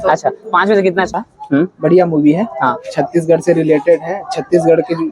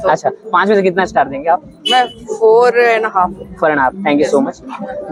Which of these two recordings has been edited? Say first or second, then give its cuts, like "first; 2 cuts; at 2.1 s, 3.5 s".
first; 1 cut; at 1.1 s